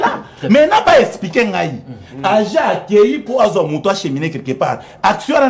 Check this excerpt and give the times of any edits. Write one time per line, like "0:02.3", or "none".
none